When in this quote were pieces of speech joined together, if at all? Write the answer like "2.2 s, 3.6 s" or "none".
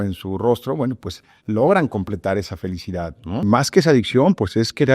3.4 s